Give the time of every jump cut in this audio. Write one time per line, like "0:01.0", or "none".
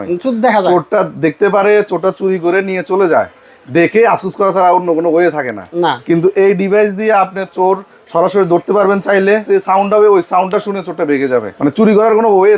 0:09.4
0:11.5